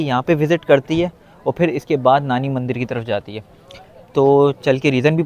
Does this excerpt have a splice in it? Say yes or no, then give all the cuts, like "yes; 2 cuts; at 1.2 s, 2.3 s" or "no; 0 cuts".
no; 0 cuts